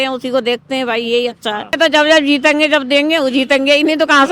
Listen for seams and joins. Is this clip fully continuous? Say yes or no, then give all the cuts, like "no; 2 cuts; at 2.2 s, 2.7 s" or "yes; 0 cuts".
no; 1 cut; at 1.6 s